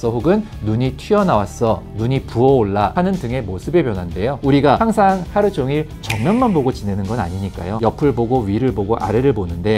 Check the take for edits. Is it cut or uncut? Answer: cut